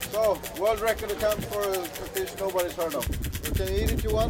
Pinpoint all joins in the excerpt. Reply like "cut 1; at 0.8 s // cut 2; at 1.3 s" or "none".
cut 1; at 3.2 s